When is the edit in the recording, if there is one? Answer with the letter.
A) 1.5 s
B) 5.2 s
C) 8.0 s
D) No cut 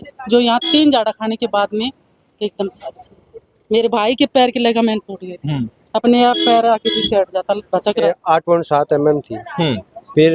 C